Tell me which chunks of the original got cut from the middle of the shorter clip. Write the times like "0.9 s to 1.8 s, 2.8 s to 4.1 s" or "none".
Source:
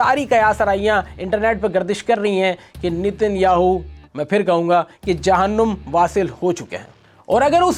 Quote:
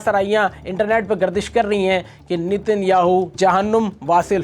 3.9 s to 5.2 s